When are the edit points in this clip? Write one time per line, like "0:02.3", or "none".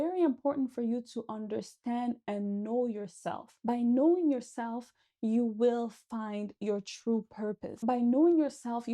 0:03.5
0:07.8